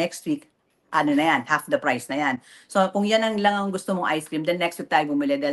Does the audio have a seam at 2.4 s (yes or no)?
no